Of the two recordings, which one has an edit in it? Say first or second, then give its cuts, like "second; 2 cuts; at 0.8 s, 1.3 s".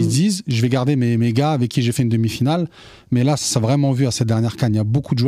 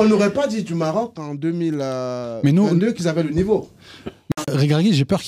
second; 1 cut; at 4.3 s